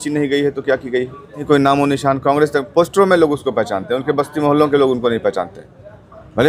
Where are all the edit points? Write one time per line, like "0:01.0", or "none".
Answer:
0:01.4